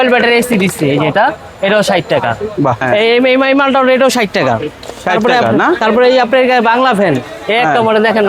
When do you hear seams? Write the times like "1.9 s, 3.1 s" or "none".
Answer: 2.8 s